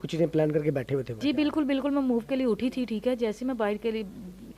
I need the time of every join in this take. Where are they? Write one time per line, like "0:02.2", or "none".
0:01.1